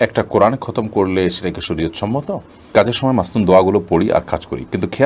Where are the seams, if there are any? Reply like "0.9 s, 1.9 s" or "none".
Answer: 2.7 s